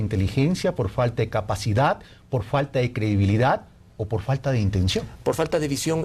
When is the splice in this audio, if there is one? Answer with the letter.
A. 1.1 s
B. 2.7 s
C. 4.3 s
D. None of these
C